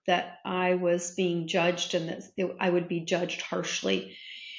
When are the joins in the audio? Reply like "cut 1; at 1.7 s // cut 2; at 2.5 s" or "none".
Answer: none